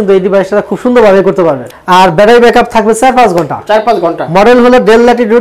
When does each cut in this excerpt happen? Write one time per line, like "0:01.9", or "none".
0:01.7